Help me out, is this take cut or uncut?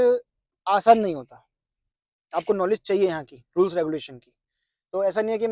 uncut